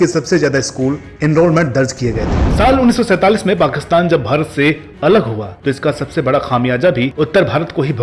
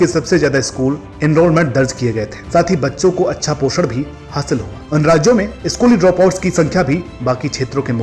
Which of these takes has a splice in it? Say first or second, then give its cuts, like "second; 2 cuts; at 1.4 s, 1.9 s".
first; 1 cut; at 2.3 s